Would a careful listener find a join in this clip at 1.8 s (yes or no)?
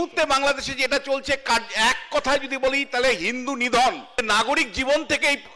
no